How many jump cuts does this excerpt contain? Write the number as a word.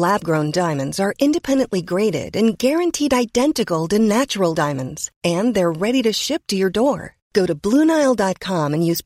zero